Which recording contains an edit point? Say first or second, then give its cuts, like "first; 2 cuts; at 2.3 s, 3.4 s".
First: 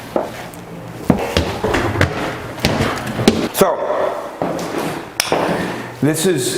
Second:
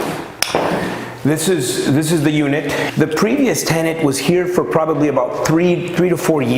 second; 1 cut; at 2.9 s